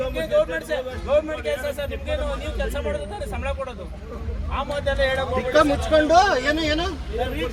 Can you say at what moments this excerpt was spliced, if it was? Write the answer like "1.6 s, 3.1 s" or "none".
none